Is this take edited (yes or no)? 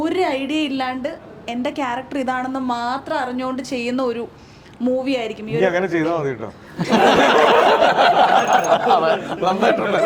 no